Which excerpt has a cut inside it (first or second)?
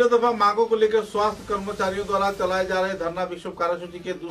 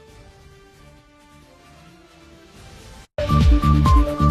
second